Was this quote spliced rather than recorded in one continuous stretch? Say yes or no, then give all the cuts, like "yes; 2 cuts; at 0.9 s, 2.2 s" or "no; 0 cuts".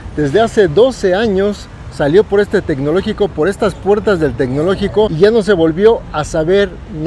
yes; 1 cut; at 5.1 s